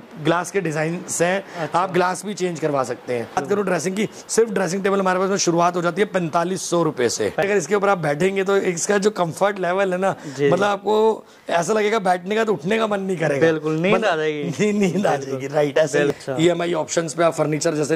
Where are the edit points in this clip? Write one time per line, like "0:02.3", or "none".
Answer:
0:03.4
0:07.4
0:16.1